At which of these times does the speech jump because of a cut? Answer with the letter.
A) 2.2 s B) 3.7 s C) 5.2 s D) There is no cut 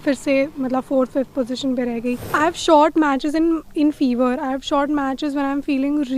A